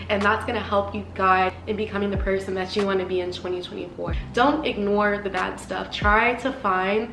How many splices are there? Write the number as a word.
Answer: one